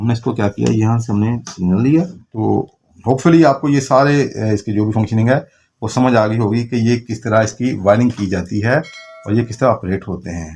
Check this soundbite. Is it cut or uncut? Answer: cut